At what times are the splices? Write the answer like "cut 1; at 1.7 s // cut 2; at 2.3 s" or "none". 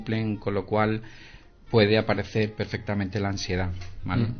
none